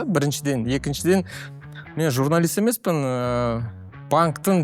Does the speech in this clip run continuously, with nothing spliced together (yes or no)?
yes